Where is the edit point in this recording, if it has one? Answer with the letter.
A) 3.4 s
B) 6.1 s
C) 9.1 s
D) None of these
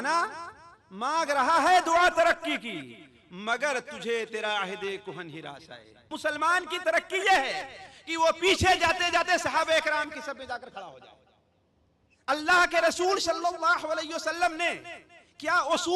B